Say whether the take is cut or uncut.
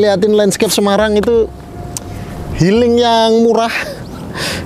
uncut